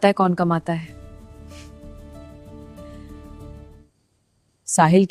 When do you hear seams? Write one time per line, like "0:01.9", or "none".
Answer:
0:03.8